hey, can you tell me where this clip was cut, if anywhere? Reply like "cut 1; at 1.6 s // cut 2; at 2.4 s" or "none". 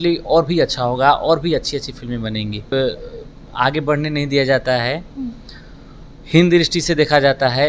cut 1; at 2.7 s